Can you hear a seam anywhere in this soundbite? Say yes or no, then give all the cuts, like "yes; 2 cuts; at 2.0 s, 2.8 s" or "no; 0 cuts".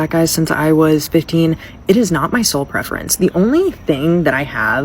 no; 0 cuts